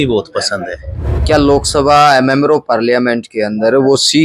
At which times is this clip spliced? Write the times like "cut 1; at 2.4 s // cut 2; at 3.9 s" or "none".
cut 1; at 1.1 s